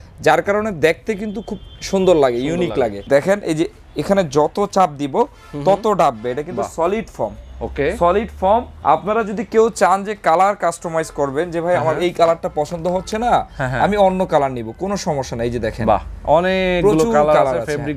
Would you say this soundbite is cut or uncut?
cut